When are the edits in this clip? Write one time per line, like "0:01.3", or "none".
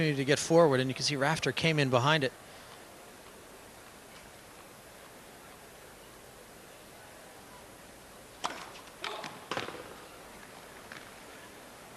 0:01.9